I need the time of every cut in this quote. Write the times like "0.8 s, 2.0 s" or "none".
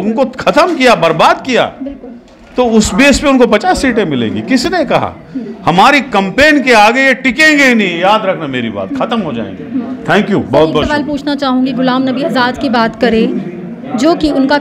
none